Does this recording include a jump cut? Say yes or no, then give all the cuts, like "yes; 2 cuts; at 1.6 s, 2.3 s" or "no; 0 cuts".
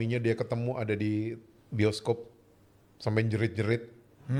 no; 0 cuts